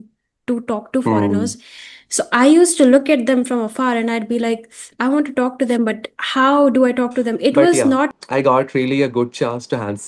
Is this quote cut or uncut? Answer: cut